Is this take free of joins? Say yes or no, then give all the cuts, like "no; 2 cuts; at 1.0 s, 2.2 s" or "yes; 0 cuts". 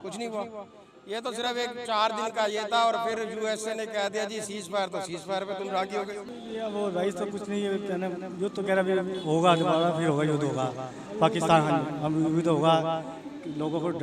no; 1 cut; at 6.2 s